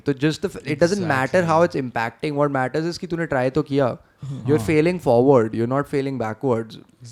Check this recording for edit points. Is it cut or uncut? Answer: uncut